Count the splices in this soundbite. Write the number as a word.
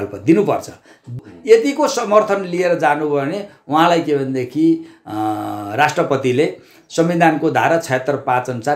one